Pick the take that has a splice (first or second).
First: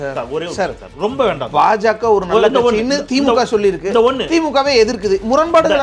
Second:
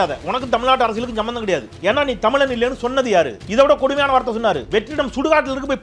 second